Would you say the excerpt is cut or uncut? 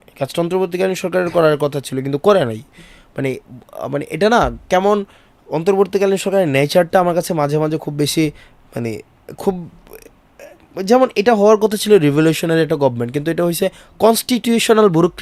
uncut